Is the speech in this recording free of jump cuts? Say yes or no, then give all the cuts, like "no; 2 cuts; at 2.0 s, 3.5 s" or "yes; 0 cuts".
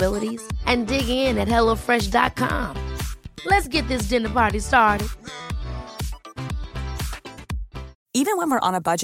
yes; 0 cuts